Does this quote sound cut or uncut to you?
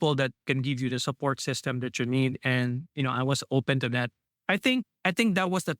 cut